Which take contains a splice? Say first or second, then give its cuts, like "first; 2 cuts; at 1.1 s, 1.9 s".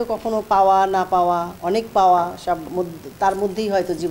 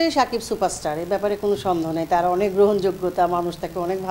first; 1 cut; at 1.5 s